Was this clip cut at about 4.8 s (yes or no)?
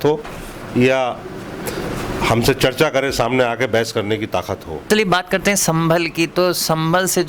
yes